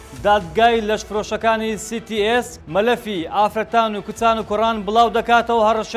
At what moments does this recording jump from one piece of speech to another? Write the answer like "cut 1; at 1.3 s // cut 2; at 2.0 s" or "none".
cut 1; at 2.5 s

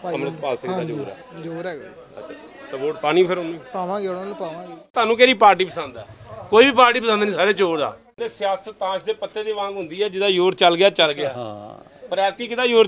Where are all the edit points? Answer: cut 1; at 4.9 s // cut 2; at 8.2 s

